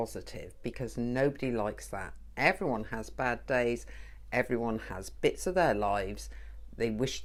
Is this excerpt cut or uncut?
uncut